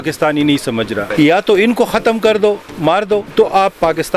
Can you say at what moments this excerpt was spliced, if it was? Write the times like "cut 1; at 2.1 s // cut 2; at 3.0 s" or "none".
cut 1; at 1.1 s // cut 2; at 3.3 s